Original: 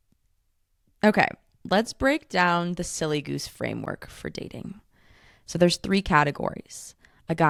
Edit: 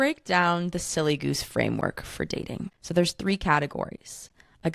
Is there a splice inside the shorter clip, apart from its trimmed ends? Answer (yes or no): yes